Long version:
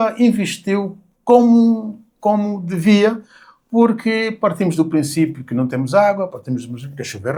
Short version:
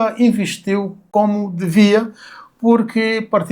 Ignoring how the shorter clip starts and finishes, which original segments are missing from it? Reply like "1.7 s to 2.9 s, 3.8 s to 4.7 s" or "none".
1.0 s to 2.1 s